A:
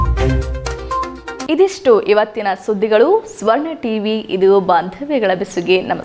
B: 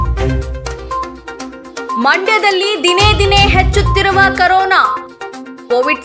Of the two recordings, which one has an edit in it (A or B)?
B